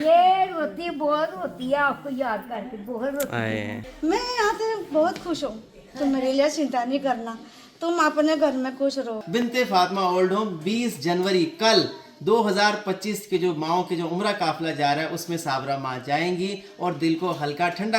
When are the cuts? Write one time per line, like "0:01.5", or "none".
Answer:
0:03.8
0:09.2

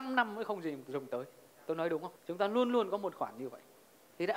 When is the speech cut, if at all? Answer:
0:02.2

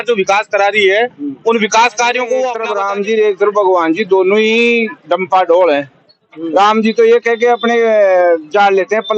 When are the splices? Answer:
0:02.7

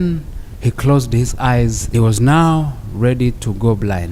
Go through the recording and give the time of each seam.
0:01.8

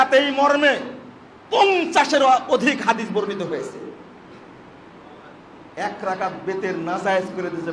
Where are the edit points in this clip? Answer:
none

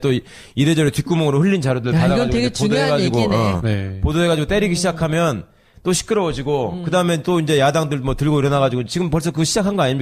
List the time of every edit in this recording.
0:03.1

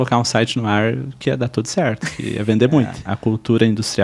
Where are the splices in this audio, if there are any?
0:03.0

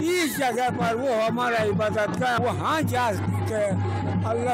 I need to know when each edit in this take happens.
0:02.4

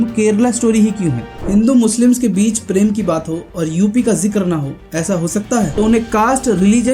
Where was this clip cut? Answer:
0:01.5
0:05.7

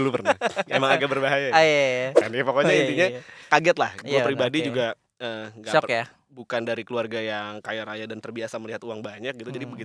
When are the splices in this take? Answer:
0:02.3

